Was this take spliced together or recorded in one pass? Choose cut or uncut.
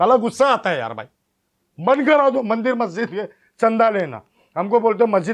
uncut